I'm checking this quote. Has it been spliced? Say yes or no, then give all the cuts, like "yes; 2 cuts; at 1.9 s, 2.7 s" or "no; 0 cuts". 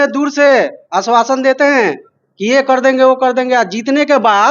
no; 0 cuts